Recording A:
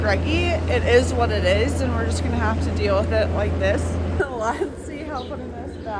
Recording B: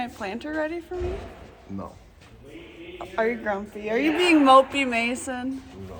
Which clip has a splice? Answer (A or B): A